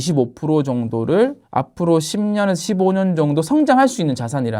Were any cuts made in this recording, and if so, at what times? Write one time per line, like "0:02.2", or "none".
none